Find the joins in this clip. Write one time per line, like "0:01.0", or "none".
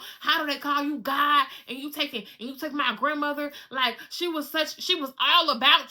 none